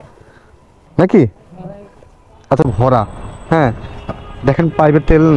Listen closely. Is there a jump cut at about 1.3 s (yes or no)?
no